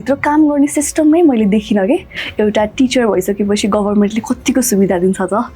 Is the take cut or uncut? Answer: cut